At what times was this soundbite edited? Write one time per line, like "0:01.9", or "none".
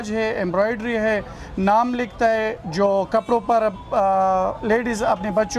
none